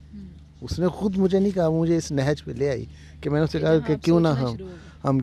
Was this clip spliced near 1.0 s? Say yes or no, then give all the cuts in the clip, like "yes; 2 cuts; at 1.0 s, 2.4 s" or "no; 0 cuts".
no; 0 cuts